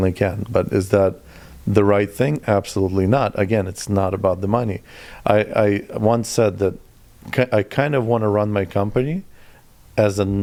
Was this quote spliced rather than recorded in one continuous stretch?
no; 0 cuts

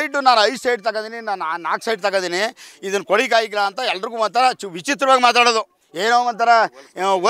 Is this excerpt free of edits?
yes; 0 cuts

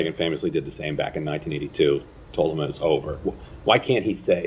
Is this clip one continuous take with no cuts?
yes; 0 cuts

